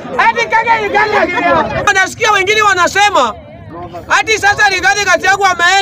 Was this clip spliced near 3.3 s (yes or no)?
no